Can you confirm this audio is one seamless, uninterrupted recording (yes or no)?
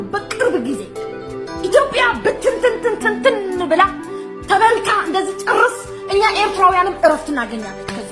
yes